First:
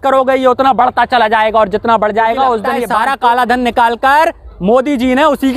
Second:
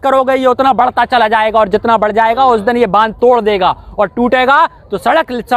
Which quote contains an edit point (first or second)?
first